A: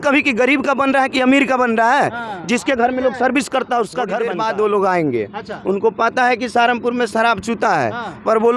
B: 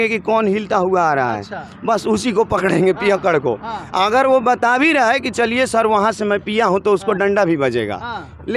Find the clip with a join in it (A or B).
A